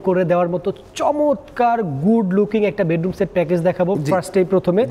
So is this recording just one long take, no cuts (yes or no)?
yes